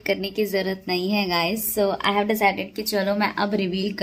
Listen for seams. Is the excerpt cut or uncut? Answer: uncut